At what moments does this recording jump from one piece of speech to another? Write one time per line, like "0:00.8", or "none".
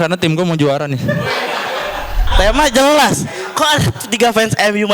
0:02.2